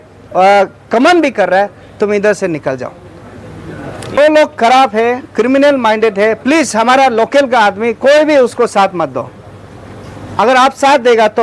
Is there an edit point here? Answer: yes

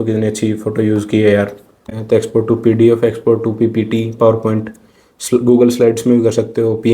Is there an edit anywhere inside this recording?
yes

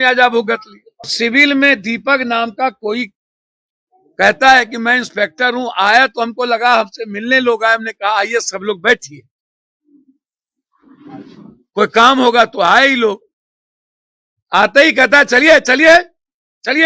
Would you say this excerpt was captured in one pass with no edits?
no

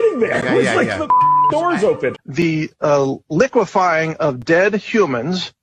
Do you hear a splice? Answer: yes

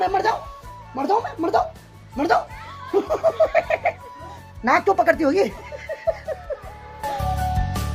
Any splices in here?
no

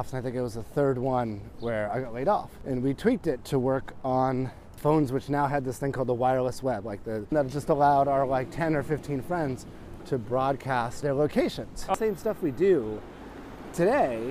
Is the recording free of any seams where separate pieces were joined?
no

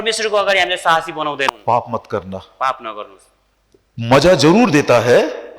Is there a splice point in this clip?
yes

